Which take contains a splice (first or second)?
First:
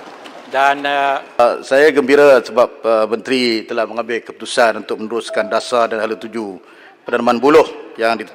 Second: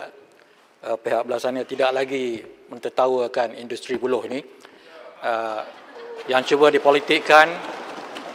first